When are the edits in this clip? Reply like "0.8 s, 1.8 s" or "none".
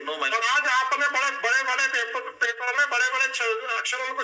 none